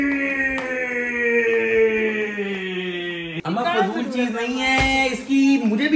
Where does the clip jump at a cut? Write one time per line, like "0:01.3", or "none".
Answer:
none